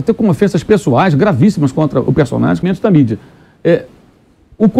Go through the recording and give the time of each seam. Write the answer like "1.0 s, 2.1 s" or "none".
2.6 s